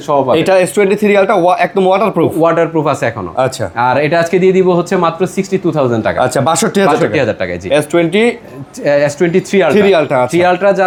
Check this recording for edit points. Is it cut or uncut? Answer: uncut